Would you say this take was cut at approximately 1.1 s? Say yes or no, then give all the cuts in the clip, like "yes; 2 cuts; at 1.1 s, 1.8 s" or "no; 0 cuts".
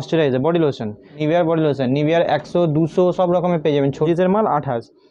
yes; 2 cuts; at 1.1 s, 4.1 s